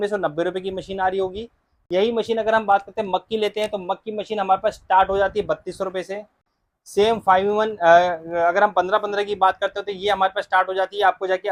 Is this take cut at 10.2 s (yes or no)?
no